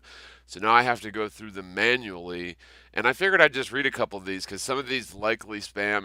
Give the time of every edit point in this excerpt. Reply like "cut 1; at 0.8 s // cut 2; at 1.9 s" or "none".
none